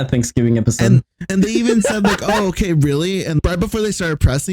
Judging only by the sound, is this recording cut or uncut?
cut